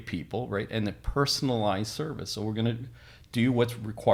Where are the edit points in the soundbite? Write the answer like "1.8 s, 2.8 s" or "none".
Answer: none